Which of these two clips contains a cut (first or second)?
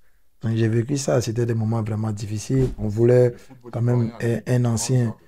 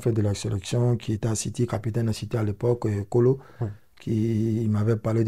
first